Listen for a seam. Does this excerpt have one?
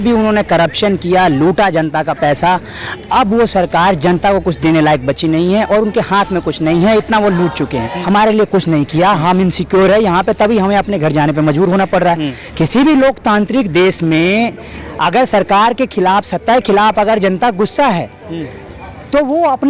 yes; 2 cuts; at 7.9 s, 12.4 s

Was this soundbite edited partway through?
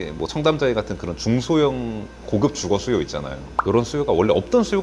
no; 0 cuts

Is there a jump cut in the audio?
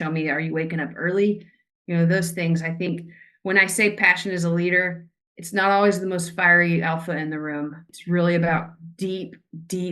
yes; 1 cut; at 7.9 s

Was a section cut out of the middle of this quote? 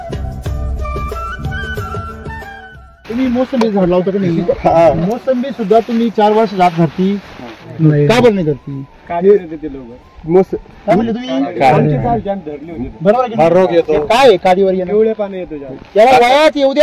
yes; 1 cut; at 2.4 s

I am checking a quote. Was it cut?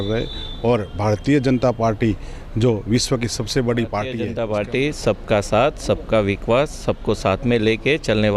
yes; 1 cut; at 4.2 s

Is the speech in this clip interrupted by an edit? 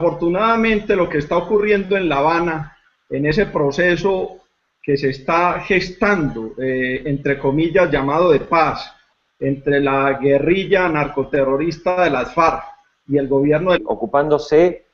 no; 0 cuts

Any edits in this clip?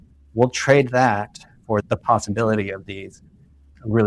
yes; 1 cut; at 1.8 s

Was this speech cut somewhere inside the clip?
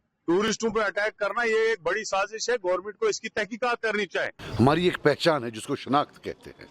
yes; 1 cut; at 4.4 s

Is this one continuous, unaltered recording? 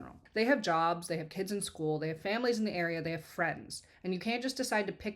yes; 0 cuts

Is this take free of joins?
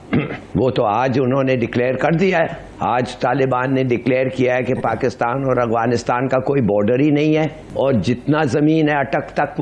no; 2 cuts; at 2.6 s, 7.6 s

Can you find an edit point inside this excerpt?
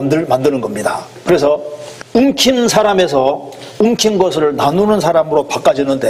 no; 0 cuts

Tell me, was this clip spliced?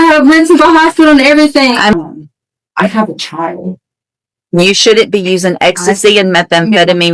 yes; 1 cut; at 1.9 s

